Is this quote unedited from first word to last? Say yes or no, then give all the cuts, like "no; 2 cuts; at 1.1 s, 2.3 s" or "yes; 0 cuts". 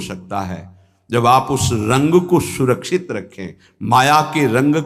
yes; 0 cuts